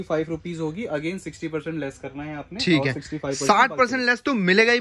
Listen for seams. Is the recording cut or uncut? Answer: uncut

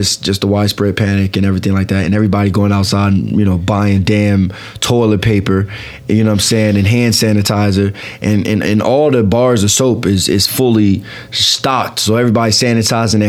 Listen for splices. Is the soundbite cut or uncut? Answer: uncut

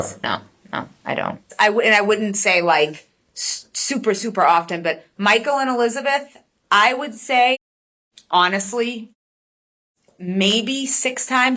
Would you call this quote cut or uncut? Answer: cut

